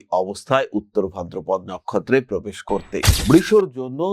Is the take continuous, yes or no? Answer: no